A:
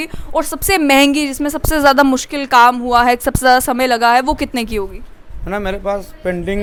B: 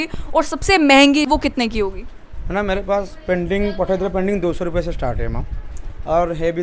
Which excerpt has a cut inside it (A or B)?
B